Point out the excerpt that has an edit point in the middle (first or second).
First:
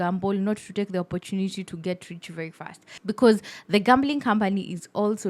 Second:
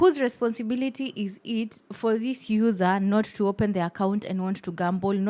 first